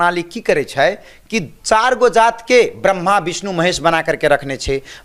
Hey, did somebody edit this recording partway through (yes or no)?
no